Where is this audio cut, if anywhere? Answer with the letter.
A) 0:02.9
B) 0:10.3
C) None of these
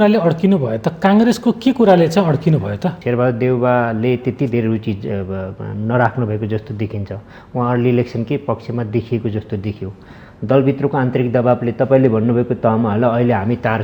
A